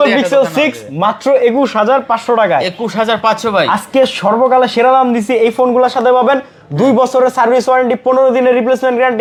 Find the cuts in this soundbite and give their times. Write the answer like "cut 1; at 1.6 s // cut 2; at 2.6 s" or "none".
none